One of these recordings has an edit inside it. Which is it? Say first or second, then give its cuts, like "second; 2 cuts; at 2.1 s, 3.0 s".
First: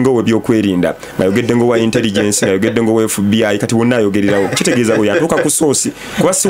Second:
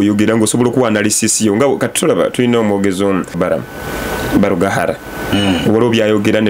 second; 1 cut; at 3.3 s